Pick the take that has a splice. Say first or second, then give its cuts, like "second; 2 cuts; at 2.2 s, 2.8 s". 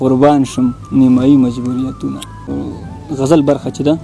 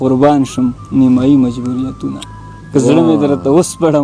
first; 1 cut; at 2.5 s